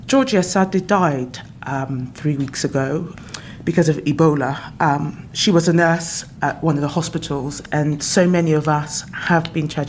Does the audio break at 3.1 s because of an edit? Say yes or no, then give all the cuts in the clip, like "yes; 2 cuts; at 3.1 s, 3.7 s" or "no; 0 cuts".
yes; 3 cuts; at 3.1 s, 6.3 s, 7.6 s